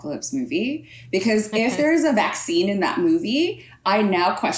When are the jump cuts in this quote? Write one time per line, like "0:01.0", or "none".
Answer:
none